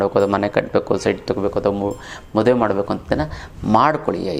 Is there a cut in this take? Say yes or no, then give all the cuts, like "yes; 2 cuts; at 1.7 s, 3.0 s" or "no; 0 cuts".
no; 0 cuts